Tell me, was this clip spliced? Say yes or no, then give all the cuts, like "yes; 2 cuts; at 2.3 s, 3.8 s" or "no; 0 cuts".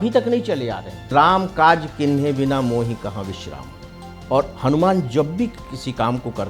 yes; 1 cut; at 1.1 s